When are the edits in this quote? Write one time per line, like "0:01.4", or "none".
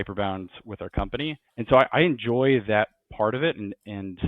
0:01.4